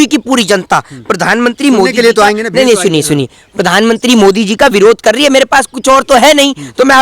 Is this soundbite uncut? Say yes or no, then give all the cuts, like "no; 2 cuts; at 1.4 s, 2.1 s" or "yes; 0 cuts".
yes; 0 cuts